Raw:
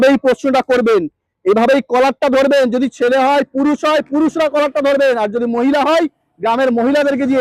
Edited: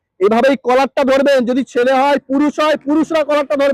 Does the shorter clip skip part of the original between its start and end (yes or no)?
no